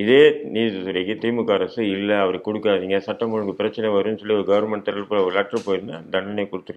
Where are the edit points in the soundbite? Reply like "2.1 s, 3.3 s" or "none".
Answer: none